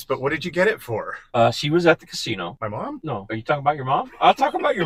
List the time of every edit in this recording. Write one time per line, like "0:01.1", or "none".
0:01.2
0:02.8